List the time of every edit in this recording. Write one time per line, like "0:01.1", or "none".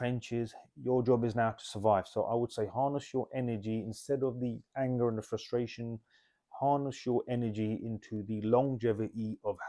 none

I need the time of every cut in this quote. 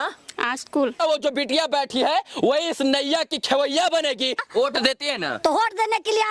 0:01.0
0:04.4

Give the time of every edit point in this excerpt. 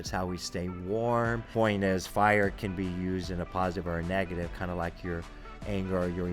0:01.5

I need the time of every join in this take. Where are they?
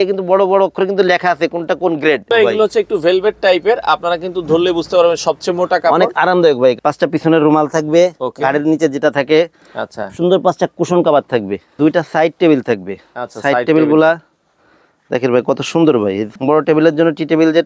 0:02.3
0:06.8
0:11.7
0:16.3

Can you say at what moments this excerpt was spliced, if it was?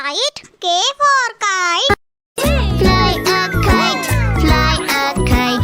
0:02.3

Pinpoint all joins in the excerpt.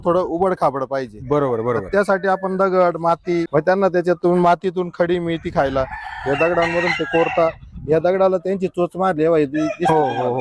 0:03.5

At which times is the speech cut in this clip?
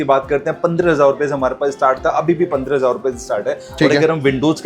none

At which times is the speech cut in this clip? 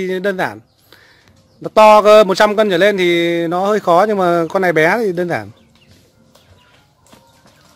none

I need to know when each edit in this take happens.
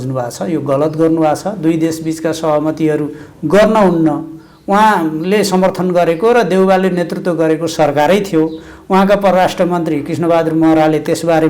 none

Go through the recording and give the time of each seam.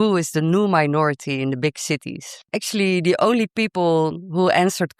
0:02.6

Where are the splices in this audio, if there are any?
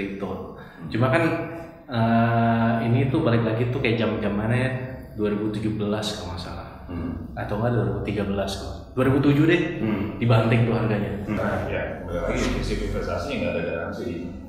0:11.4

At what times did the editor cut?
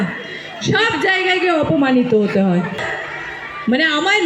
0:02.9

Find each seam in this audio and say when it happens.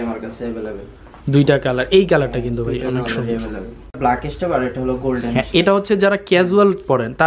0:04.0

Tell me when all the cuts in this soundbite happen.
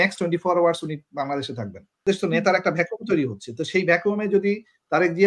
0:02.0

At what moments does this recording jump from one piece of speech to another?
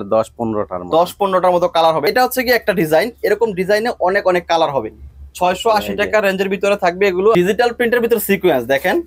0:02.0
0:07.3

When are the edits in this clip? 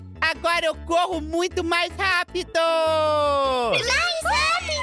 none

